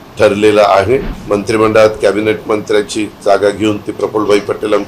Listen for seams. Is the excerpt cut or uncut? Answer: cut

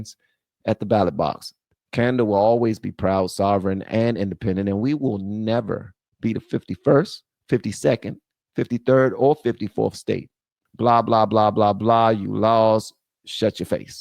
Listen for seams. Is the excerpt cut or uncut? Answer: cut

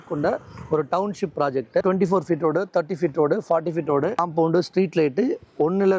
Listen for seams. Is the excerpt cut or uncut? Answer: cut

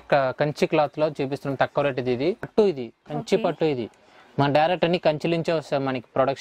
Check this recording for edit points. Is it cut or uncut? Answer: cut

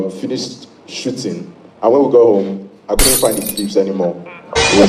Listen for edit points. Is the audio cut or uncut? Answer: uncut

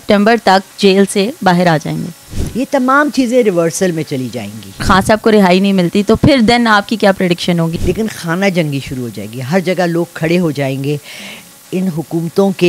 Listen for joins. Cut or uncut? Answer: cut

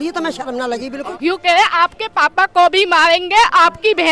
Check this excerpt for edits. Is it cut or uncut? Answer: cut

